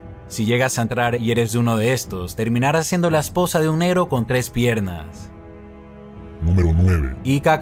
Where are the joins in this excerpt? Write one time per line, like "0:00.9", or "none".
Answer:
none